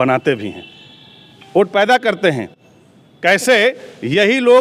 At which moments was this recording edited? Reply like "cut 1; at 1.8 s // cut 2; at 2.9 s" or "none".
none

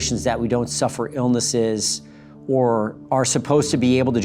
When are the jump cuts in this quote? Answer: none

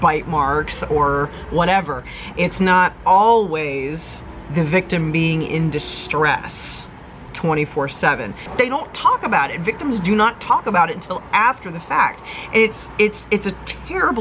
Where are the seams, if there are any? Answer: cut 1; at 8.4 s

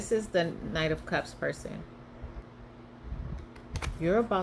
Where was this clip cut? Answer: cut 1; at 2.4 s

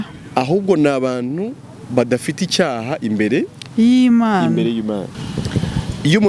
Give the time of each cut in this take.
cut 1; at 5.1 s

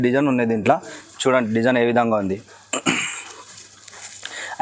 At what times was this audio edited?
none

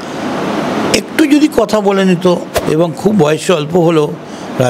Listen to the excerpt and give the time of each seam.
cut 1; at 2.6 s

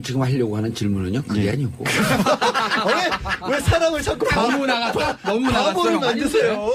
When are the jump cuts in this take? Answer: cut 1; at 3.8 s

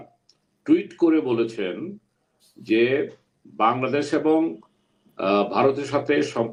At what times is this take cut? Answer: none

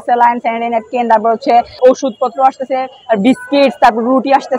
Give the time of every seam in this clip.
cut 1; at 1.8 s

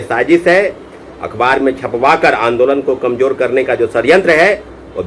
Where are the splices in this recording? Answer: none

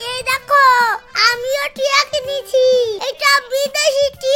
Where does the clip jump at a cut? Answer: cut 1; at 3.0 s

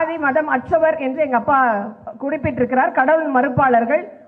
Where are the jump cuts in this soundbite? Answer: none

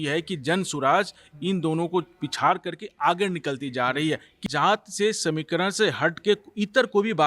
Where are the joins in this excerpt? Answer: cut 1; at 4.4 s

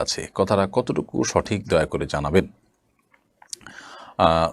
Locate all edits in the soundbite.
none

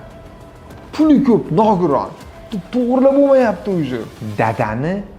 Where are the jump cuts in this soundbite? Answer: cut 1; at 4.2 s

